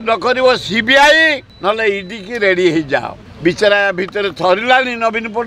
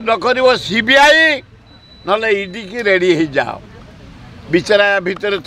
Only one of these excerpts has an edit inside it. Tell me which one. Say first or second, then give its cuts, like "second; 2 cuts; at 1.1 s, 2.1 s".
first; 2 cuts; at 1.5 s, 3.2 s